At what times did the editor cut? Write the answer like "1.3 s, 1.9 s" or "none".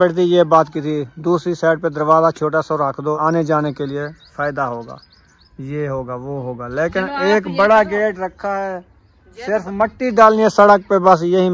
3.2 s